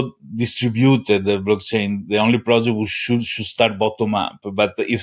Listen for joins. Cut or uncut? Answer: uncut